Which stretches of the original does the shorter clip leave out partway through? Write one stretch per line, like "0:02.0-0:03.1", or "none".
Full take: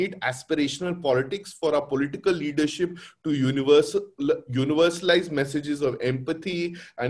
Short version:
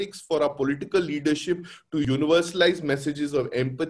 0:03.4-0:04.5